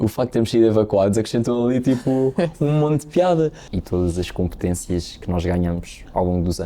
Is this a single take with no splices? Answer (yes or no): no